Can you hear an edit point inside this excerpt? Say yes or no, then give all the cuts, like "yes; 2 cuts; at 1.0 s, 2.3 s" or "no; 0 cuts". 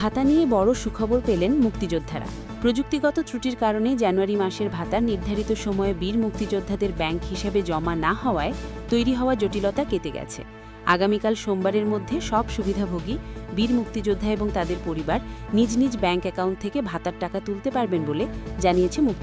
no; 0 cuts